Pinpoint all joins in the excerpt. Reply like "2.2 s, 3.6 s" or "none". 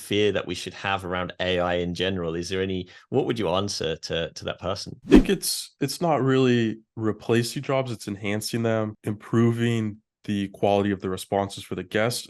none